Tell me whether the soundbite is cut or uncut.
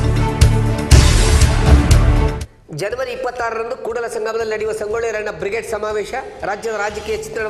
uncut